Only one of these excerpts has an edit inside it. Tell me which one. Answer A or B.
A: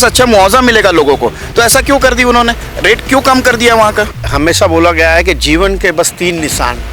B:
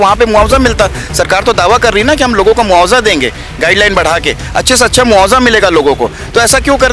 A